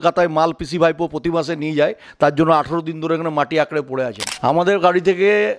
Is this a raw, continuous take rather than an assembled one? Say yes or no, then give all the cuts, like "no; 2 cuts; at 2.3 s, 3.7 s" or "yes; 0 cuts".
no; 1 cut; at 4.2 s